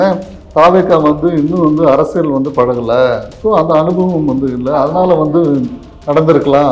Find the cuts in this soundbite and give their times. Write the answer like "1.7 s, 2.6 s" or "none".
none